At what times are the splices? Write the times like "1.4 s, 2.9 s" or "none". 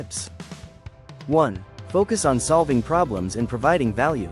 1.7 s